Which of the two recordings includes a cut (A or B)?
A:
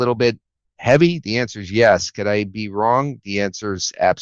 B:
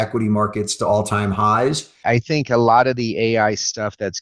B